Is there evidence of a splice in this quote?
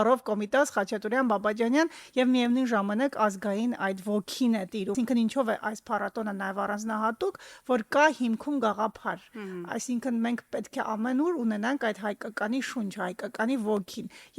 yes; 1 cut; at 4.9 s

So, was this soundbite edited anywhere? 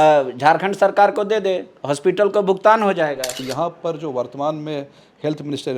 yes; 1 cut; at 3.4 s

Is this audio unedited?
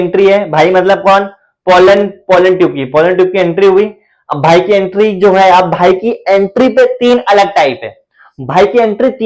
yes; 0 cuts

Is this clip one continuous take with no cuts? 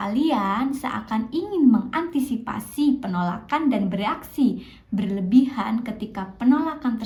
yes; 0 cuts

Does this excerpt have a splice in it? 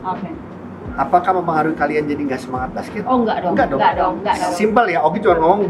no; 0 cuts

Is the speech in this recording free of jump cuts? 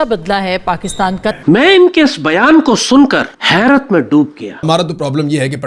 no; 2 cuts; at 1.4 s, 4.6 s

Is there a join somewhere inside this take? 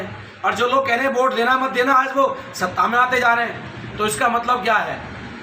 no; 0 cuts

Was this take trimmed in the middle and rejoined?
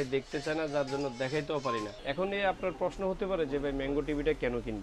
yes; 1 cut; at 1.9 s

